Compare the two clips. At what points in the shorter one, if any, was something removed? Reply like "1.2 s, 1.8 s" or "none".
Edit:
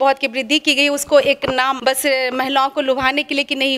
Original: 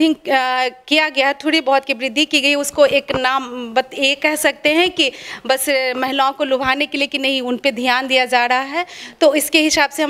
1.8 s

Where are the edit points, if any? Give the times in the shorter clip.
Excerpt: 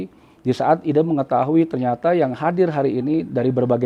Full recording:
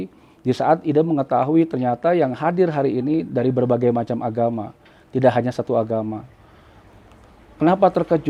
none

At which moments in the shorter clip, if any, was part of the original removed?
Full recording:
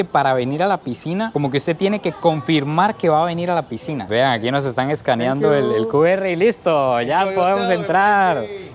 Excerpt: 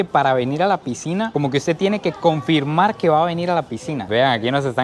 none

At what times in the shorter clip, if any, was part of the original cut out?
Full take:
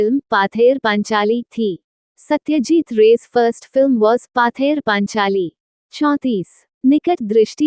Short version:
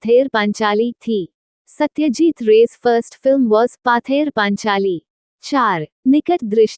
5.5 s

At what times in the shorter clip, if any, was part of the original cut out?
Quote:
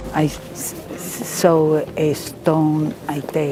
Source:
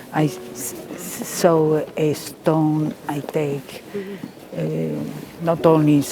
none

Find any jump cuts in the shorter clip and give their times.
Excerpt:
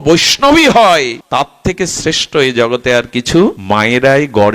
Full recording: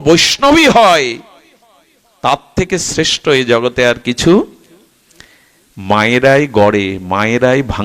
1.2 s, 3.6 s

